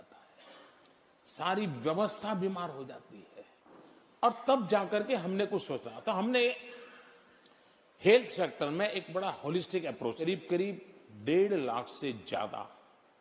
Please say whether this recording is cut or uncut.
cut